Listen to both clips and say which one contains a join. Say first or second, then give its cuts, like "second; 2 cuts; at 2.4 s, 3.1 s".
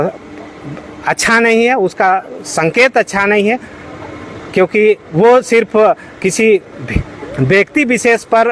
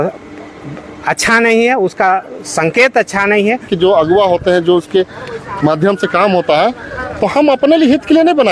second; 1 cut; at 3.7 s